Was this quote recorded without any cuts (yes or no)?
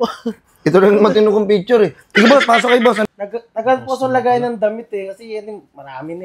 no